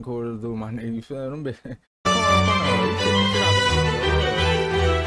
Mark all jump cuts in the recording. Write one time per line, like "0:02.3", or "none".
0:02.1